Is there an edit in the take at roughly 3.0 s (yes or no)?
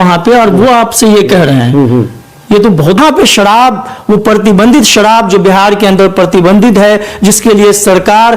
yes